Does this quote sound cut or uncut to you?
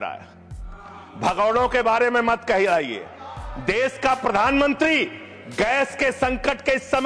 uncut